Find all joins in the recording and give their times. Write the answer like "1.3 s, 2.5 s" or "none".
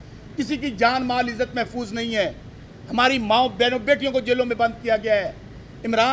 none